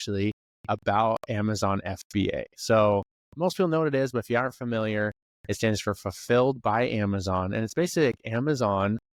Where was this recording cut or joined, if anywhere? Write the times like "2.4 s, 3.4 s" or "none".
none